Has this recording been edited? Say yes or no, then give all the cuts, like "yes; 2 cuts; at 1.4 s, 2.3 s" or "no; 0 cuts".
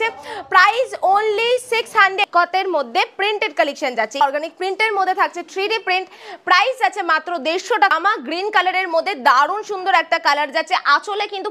yes; 3 cuts; at 2.2 s, 4.2 s, 7.9 s